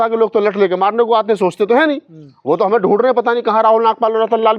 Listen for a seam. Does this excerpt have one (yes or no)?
no